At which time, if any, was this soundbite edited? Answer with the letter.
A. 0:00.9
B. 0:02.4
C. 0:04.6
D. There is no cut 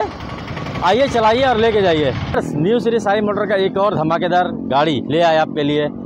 B